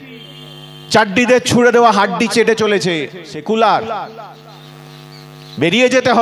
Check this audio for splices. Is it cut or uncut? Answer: cut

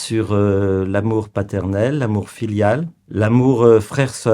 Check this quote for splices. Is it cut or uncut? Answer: cut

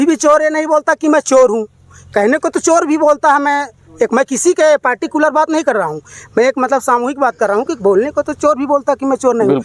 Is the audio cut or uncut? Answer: uncut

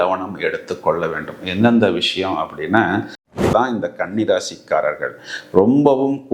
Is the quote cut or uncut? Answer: cut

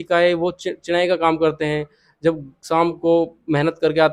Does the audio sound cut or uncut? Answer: uncut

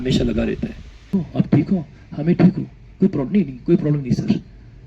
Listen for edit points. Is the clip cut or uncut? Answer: cut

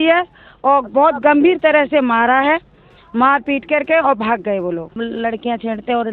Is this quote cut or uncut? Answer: cut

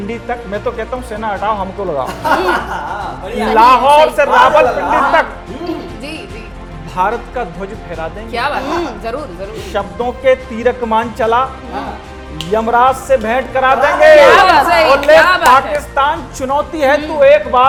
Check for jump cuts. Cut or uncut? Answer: uncut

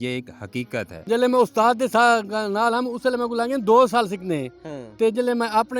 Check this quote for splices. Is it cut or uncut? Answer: cut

